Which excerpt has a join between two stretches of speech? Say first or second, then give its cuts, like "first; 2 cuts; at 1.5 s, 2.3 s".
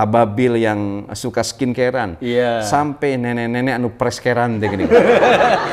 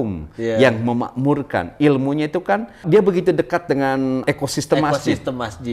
second; 2 cuts; at 2.8 s, 4.2 s